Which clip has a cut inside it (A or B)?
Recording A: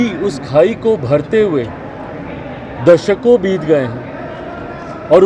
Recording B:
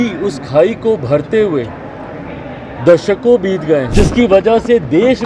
B